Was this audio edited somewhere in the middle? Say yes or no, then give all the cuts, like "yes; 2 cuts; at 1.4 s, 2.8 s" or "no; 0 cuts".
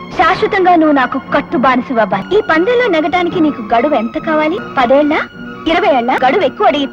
yes; 3 cuts; at 2.2 s, 4.6 s, 6.2 s